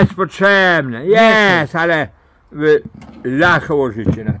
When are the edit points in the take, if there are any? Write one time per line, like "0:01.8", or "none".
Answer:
none